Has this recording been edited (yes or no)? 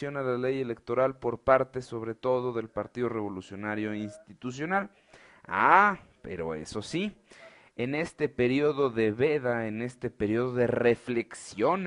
no